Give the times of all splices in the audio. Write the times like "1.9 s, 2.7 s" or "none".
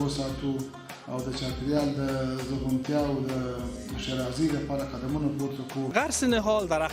5.9 s

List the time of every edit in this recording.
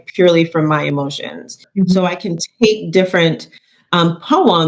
1.6 s

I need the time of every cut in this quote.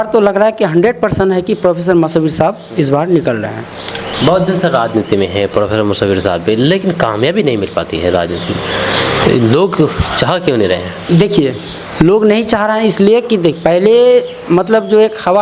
none

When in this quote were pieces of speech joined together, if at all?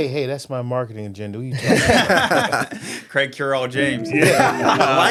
none

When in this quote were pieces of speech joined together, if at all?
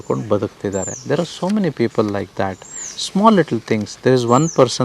none

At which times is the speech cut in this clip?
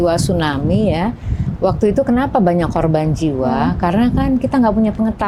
none

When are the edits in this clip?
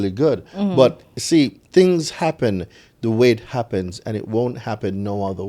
1.6 s

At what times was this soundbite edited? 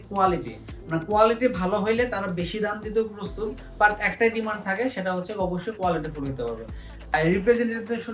7.0 s

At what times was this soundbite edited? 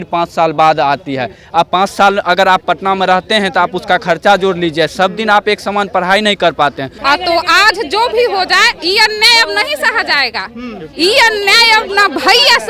7.1 s

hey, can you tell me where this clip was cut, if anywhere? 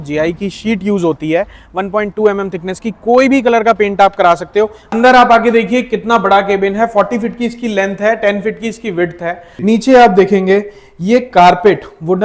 4.8 s, 9.5 s

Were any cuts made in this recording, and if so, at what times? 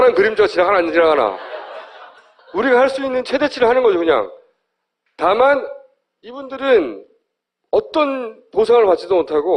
none

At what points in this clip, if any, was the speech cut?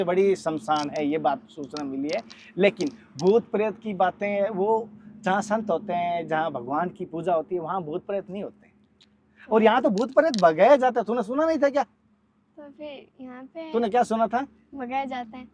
none

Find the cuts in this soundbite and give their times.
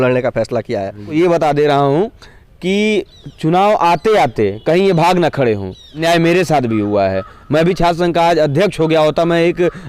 1.1 s, 6.0 s

